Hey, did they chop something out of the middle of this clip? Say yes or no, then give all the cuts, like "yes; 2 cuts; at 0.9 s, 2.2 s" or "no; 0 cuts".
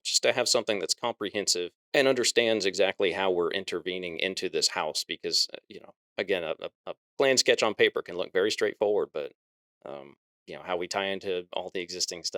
yes; 1 cut; at 1.8 s